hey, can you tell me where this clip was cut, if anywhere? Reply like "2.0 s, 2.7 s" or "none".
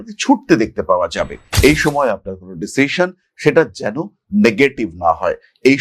1.4 s